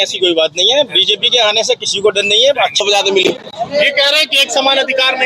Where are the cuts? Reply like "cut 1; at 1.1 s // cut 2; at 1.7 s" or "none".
cut 1; at 2.8 s